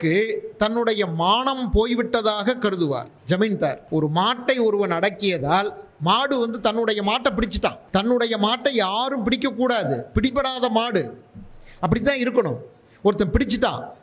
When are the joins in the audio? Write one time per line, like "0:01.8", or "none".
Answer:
0:03.1
0:03.8
0:07.8